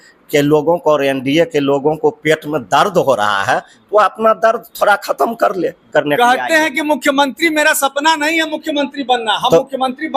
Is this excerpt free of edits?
no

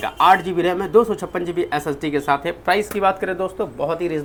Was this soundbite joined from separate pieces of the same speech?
no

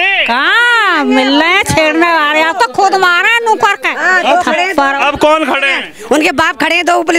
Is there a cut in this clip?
no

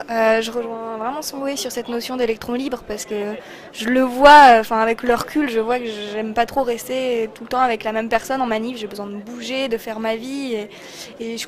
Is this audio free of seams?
yes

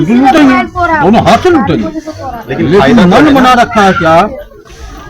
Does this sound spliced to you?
no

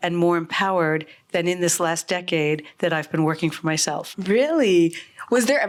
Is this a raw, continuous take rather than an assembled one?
yes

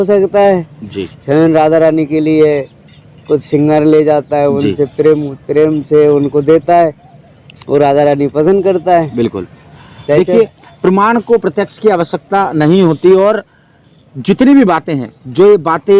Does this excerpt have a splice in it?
no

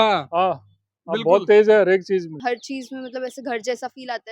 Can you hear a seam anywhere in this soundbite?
yes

